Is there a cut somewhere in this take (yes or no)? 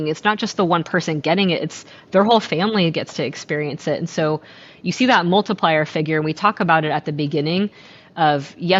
no